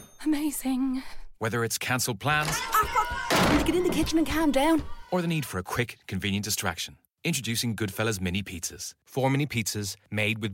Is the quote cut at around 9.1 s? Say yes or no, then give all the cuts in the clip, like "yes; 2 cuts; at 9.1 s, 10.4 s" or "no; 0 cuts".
no; 0 cuts